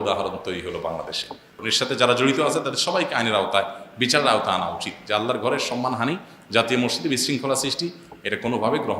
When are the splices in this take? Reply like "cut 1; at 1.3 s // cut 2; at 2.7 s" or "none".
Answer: cut 1; at 1.5 s